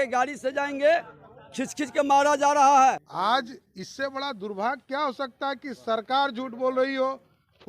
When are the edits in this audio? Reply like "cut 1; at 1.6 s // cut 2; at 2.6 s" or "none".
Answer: cut 1; at 3.1 s

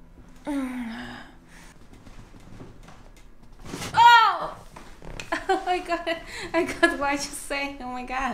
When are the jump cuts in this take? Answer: cut 1; at 1.7 s

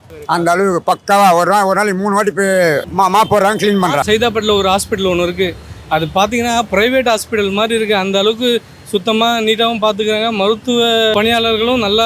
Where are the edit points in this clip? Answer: cut 1; at 4.0 s // cut 2; at 11.1 s

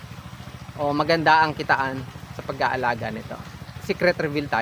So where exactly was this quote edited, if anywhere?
cut 1; at 3.7 s

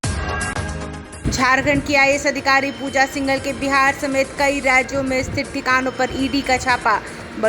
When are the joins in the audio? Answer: cut 1; at 1.1 s

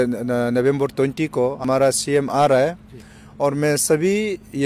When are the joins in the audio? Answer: cut 1; at 1.6 s

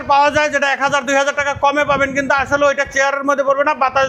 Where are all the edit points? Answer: none

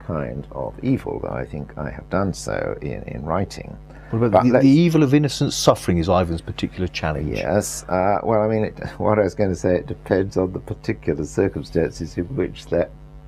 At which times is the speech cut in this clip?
none

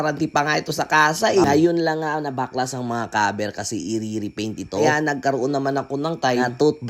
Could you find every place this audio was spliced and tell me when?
cut 1; at 1.4 s

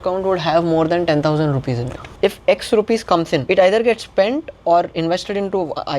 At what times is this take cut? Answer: cut 1; at 2.1 s // cut 2; at 3.4 s

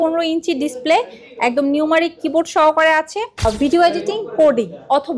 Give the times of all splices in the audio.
cut 1; at 3.4 s

